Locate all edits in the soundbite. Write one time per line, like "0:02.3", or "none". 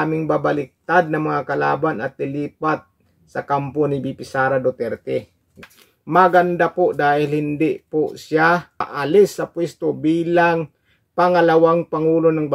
0:05.7
0:08.9